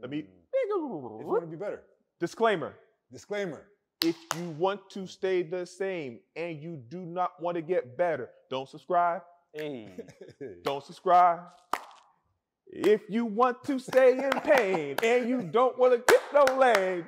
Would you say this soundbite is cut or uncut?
uncut